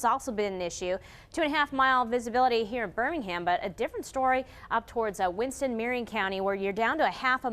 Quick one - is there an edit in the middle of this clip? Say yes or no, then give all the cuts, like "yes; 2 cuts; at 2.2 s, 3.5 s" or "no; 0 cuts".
no; 0 cuts